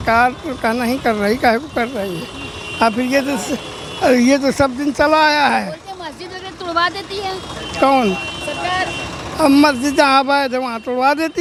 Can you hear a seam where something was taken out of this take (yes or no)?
no